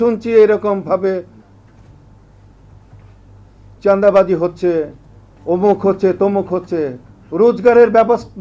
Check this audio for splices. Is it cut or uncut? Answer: uncut